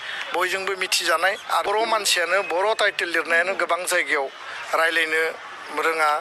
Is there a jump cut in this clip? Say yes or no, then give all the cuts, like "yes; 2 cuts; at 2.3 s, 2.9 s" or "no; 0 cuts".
yes; 1 cut; at 1.7 s